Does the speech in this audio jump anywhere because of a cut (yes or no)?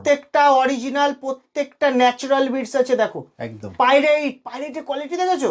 no